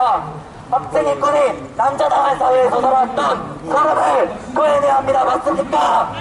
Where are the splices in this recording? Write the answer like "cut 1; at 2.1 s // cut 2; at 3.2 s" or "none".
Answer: cut 1; at 4.8 s